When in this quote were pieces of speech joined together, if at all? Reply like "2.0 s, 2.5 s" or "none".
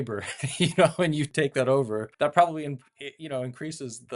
1.3 s, 2.1 s